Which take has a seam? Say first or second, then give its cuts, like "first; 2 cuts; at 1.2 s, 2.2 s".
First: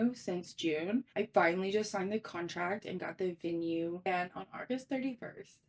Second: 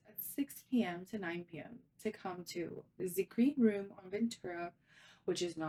first; 2 cuts; at 1.1 s, 4.1 s